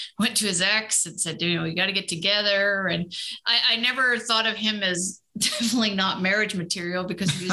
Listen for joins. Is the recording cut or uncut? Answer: uncut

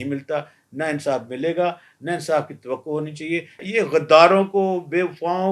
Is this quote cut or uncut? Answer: cut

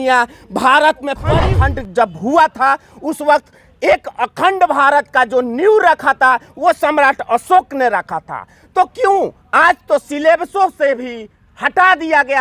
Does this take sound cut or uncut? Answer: cut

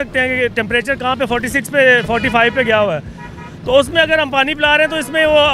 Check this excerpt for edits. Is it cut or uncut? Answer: uncut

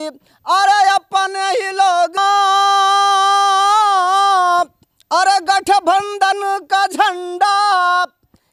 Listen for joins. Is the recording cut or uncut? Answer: cut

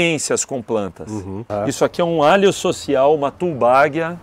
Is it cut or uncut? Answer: cut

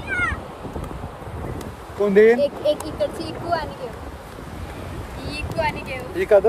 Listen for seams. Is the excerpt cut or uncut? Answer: uncut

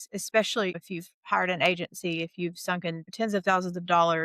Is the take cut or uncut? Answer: cut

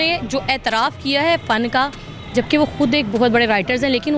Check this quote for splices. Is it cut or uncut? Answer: uncut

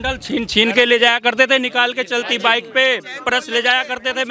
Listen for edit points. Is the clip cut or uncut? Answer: uncut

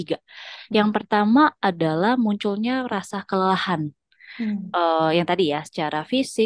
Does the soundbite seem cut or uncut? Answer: uncut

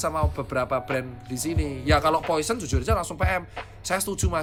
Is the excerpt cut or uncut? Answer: uncut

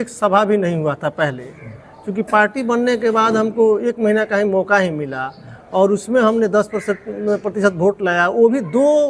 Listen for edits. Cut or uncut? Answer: uncut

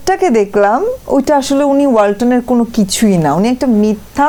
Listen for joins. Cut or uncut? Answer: uncut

